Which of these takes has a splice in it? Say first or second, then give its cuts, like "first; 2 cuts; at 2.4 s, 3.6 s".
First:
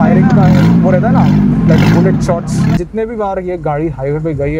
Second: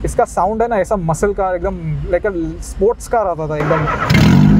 first; 1 cut; at 2.8 s